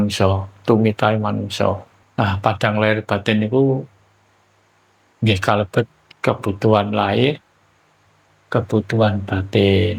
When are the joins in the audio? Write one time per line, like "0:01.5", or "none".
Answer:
0:02.0